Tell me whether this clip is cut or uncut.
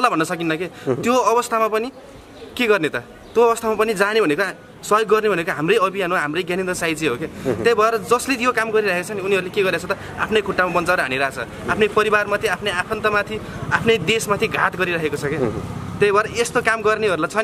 uncut